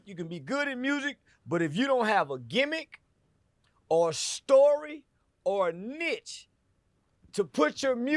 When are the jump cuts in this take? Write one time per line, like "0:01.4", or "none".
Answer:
none